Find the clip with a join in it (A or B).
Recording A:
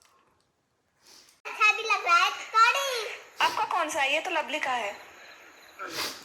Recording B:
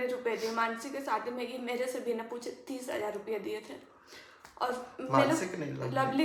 A